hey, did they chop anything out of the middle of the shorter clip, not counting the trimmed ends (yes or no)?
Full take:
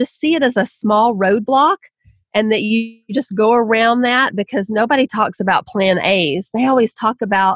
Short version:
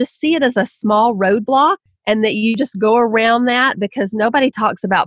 yes